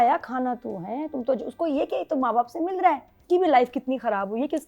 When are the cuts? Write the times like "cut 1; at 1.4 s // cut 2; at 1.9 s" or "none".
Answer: cut 1; at 3.1 s